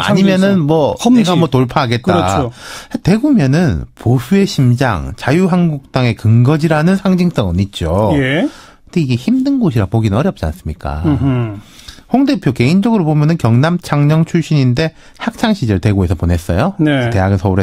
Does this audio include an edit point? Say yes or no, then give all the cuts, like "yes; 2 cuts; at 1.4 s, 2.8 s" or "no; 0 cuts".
yes; 1 cut; at 9.0 s